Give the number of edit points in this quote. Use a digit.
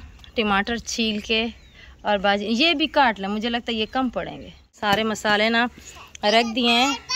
1